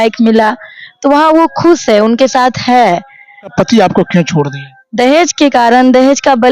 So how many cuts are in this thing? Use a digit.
1